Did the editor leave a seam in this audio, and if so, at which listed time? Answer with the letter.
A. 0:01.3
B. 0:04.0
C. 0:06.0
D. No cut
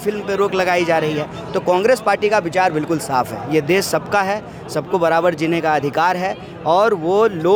D